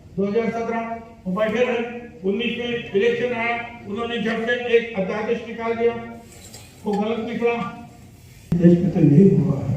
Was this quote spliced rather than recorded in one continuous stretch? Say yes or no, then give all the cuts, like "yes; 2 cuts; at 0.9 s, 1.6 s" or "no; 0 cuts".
yes; 1 cut; at 8.5 s